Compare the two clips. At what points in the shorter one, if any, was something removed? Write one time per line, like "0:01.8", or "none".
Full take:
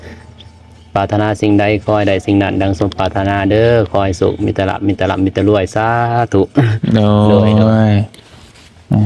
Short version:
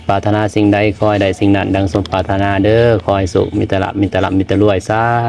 none

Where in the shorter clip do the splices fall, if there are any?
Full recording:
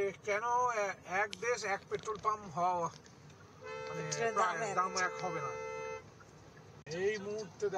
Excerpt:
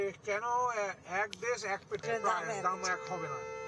0:02.0

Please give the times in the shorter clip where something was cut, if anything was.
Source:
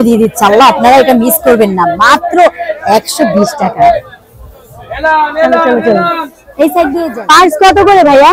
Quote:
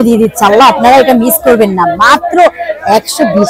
none

